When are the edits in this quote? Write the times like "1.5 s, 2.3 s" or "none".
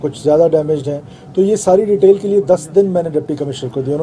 none